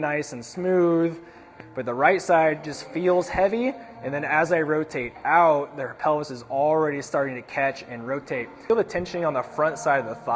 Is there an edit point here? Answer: yes; 2 cuts; at 1.6 s, 8.6 s

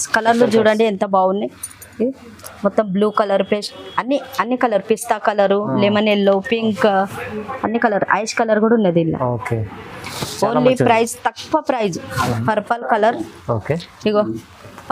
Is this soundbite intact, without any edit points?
no; 1 cut; at 12.1 s

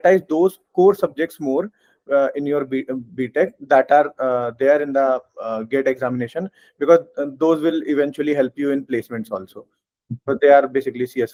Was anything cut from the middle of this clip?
no; 0 cuts

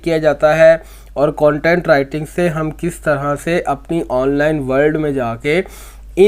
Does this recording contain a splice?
no; 0 cuts

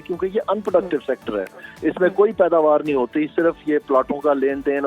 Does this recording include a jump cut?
no; 0 cuts

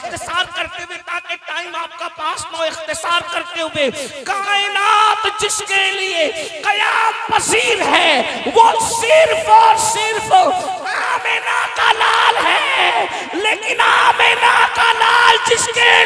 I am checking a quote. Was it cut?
no; 0 cuts

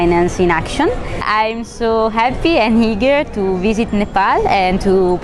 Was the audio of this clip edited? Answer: no; 0 cuts

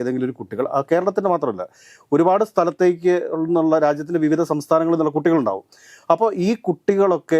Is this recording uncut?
yes; 0 cuts

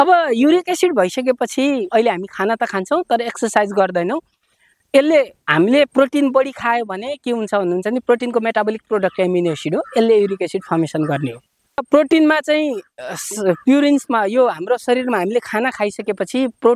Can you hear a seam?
yes; 2 cuts; at 1.9 s, 11.8 s

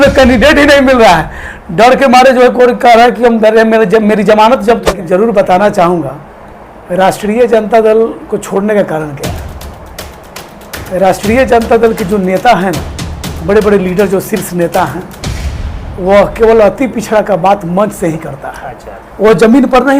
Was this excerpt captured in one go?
no; 1 cut; at 5.0 s

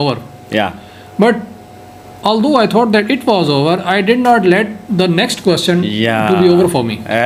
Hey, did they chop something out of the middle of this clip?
no; 0 cuts

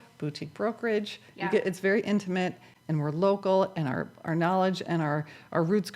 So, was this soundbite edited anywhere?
no; 0 cuts

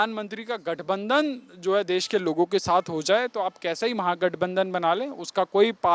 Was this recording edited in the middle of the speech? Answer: no; 0 cuts

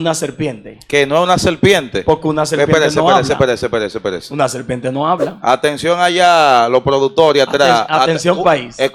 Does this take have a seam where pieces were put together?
no; 0 cuts

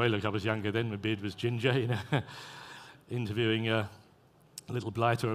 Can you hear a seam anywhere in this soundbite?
yes; 1 cut; at 1.4 s

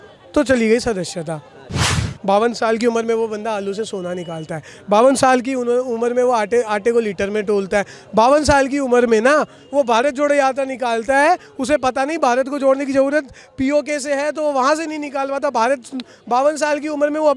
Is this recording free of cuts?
no; 1 cut; at 1.9 s

